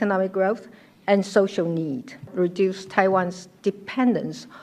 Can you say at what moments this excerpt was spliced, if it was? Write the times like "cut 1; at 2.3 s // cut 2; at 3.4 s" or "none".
cut 1; at 2.3 s